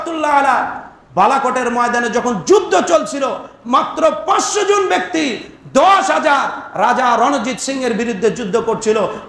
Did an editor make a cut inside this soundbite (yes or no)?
no